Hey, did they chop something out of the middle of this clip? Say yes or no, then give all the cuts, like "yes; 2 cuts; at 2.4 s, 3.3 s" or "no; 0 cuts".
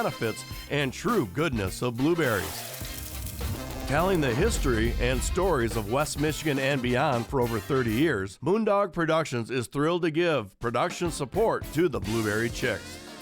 yes; 1 cut; at 8.3 s